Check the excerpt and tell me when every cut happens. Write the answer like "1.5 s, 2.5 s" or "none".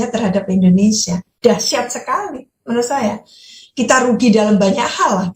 none